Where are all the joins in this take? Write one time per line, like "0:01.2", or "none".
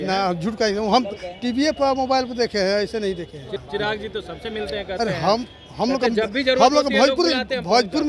0:03.5